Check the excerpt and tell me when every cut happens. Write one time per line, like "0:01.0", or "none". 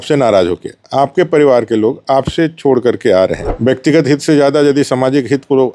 0:03.5